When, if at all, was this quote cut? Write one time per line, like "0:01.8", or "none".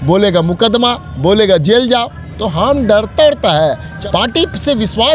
0:03.9